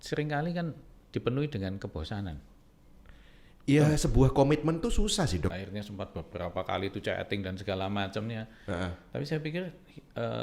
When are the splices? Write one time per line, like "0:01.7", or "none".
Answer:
0:05.5

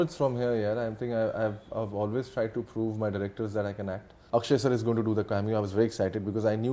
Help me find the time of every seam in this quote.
0:04.1

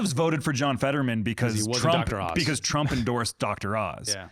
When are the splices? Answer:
none

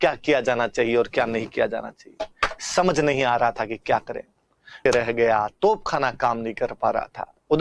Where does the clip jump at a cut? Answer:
0:04.8

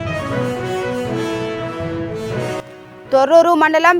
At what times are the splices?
none

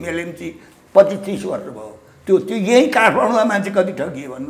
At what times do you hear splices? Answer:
none

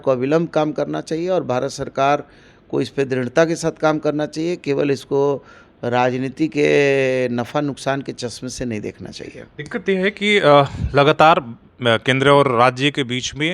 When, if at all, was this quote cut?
none

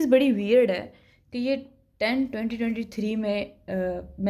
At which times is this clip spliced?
none

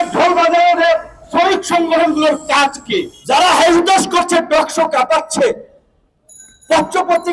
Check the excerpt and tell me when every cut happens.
0:03.1

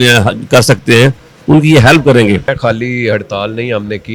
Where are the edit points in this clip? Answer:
0:02.5

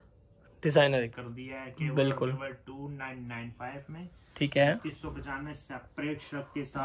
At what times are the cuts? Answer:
0:01.2

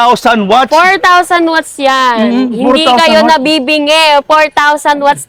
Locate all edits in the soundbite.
none

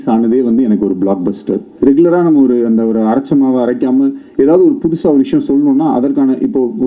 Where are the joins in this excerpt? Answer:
0:01.7

